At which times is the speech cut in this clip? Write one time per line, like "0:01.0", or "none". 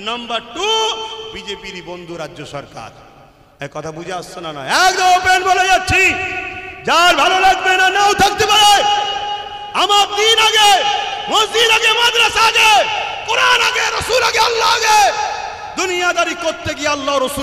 none